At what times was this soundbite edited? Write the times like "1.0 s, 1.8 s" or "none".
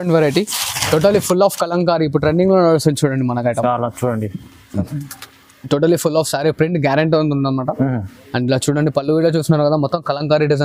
none

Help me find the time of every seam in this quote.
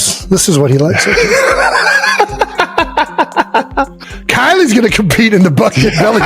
3.9 s

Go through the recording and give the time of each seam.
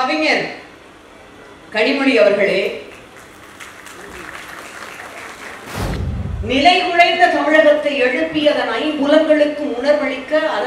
5.8 s

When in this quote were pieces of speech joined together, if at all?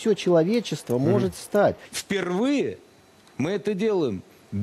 1.9 s

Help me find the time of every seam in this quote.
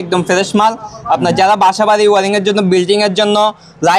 none

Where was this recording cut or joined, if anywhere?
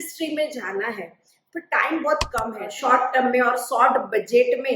2.6 s

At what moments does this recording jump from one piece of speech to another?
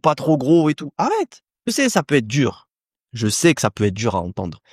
1.7 s

